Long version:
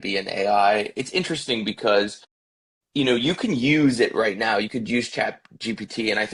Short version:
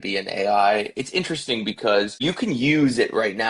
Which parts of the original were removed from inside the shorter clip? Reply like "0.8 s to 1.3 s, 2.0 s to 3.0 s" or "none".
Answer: 2.2 s to 3.2 s